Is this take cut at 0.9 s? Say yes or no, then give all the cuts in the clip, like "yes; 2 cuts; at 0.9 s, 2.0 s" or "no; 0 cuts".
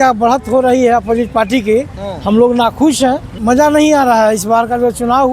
no; 1 cut; at 3.3 s